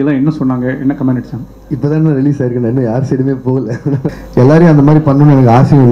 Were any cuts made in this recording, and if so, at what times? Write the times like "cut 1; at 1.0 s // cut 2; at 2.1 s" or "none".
cut 1; at 4.2 s